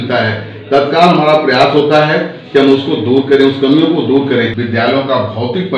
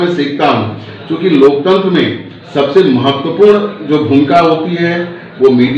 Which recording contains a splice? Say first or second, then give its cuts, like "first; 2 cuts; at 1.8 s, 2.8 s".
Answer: first; 1 cut; at 4.6 s